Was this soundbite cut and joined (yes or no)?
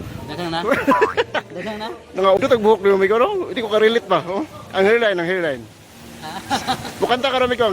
yes